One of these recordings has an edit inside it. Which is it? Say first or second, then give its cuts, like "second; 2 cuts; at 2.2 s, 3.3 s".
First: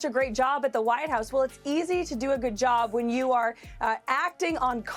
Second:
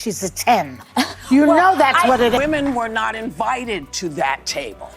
second; 1 cut; at 2.4 s